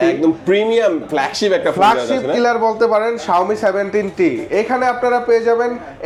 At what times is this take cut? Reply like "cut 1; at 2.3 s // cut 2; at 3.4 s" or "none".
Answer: none